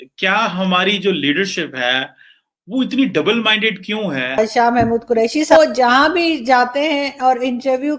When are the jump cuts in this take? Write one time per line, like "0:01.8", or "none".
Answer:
0:04.4
0:05.5